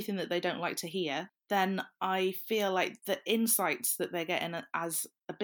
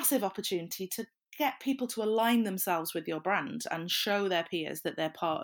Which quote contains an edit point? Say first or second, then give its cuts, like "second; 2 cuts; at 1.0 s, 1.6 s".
first; 1 cut; at 1.3 s